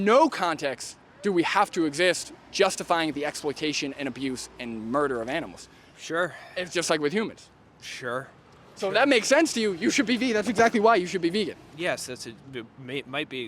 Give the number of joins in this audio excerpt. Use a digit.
0